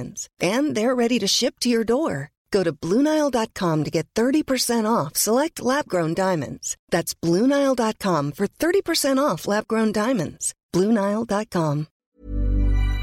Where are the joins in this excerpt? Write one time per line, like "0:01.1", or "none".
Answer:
0:12.0